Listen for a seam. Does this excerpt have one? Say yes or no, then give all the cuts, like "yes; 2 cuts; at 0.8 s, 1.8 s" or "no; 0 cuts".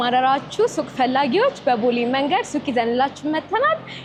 no; 0 cuts